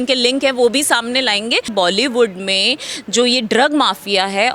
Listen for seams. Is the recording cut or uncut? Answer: cut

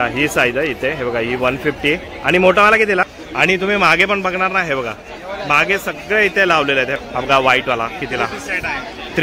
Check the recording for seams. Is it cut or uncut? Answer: cut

